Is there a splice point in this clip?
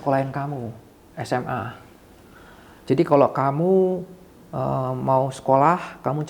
no; 0 cuts

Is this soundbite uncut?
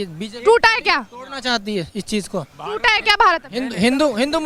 yes; 0 cuts

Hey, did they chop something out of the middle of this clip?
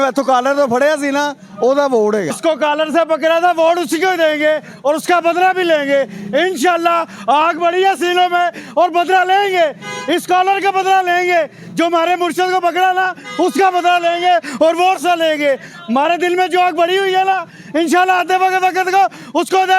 yes; 1 cut; at 2.4 s

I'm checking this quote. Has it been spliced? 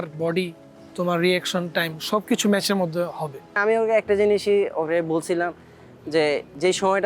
yes; 1 cut; at 3.6 s

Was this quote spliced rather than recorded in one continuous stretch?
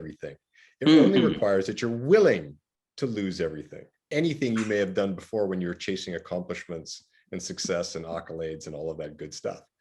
yes; 1 cut; at 4.1 s

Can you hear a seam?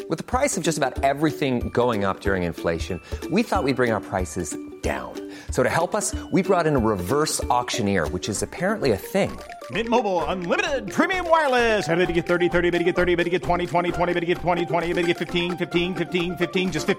no; 0 cuts

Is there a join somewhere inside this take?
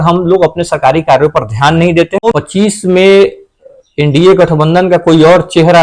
yes; 1 cut; at 2.2 s

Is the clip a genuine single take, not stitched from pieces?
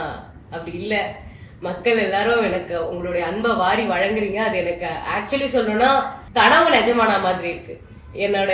no; 1 cut; at 6.2 s

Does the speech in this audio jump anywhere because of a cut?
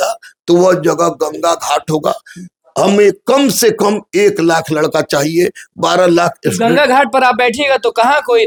no; 0 cuts

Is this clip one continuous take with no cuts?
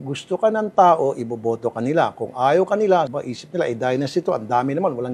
yes; 0 cuts

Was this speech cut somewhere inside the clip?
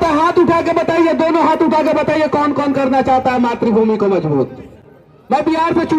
no; 0 cuts

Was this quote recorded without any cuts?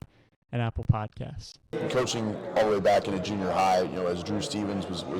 no; 1 cut; at 1.7 s

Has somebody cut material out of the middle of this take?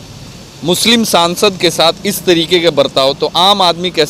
no; 0 cuts

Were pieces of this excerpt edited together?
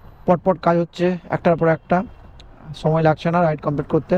no; 0 cuts

